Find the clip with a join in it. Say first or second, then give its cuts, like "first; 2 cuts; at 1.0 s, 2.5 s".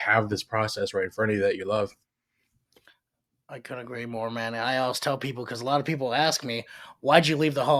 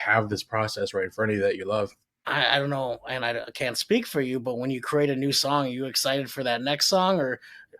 second; 1 cut; at 2.1 s